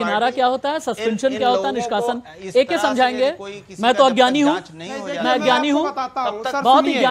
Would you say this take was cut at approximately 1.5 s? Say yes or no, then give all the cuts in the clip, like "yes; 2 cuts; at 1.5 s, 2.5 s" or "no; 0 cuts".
no; 0 cuts